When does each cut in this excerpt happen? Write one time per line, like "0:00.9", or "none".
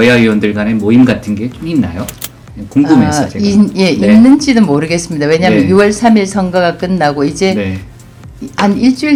none